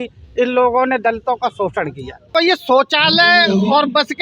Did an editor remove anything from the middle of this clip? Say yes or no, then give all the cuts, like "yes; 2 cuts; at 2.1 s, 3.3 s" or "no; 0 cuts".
yes; 1 cut; at 2.3 s